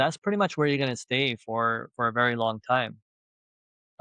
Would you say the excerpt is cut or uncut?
uncut